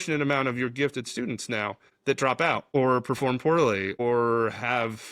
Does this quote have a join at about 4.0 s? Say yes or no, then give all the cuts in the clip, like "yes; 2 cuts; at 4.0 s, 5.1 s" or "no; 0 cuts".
yes; 3 cuts; at 1.9 s, 2.7 s, 4.0 s